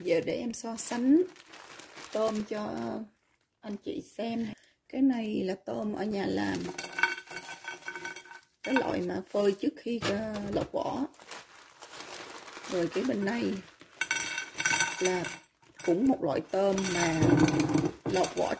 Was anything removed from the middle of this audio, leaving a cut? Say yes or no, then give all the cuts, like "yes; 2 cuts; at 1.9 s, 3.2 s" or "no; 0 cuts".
yes; 1 cut; at 4.5 s